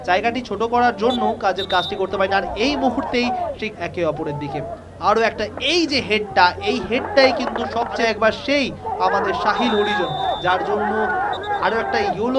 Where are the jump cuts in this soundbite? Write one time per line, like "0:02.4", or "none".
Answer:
0:03.7
0:08.0